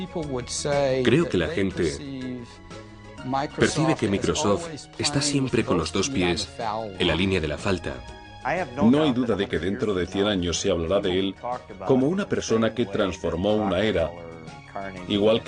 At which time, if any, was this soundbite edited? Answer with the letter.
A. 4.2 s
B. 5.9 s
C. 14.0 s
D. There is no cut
B